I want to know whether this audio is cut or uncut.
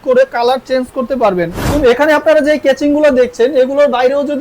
cut